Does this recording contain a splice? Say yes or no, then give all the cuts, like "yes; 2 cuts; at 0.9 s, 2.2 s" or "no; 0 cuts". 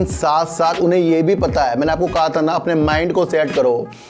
no; 0 cuts